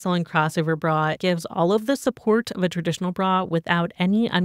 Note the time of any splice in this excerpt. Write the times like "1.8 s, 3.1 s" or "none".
none